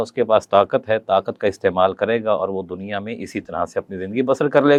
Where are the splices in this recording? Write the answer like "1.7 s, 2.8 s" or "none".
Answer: none